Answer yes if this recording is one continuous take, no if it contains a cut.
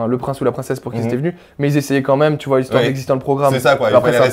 yes